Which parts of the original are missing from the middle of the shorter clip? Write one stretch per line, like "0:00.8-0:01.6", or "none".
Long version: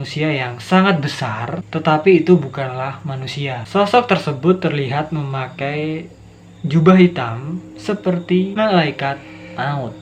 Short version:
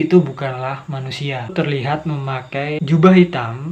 0:03.7-0:04.6
0:05.9-0:06.6